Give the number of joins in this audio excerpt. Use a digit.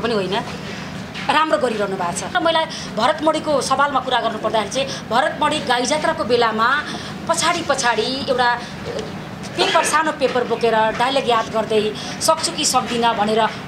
1